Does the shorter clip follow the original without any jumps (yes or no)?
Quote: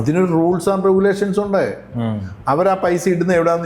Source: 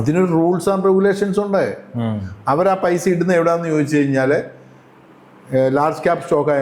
yes